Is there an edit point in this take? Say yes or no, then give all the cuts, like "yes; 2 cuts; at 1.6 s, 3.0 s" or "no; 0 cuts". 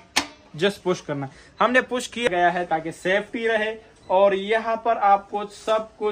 yes; 1 cut; at 2.3 s